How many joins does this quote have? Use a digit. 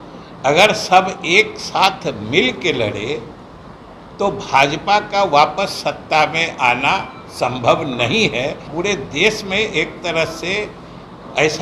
1